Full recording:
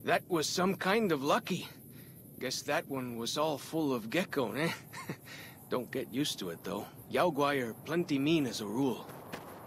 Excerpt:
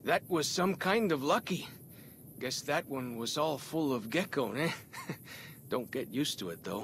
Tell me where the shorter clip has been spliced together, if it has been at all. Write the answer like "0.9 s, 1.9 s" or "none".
none